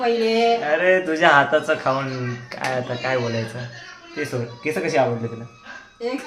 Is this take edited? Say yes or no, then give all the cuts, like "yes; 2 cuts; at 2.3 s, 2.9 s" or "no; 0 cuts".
no; 0 cuts